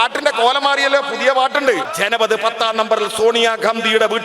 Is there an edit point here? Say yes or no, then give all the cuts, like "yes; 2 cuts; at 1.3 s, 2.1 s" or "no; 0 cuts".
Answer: yes; 1 cut; at 1.9 s